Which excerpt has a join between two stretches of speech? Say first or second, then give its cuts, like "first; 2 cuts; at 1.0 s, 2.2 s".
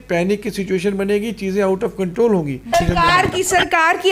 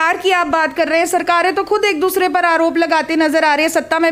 first; 1 cut; at 2.7 s